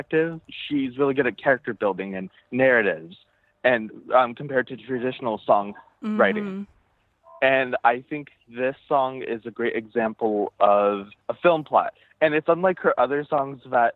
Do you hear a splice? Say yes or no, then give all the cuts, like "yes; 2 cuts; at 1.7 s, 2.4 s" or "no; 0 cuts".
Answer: no; 0 cuts